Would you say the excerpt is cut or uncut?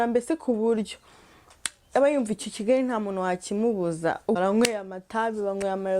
cut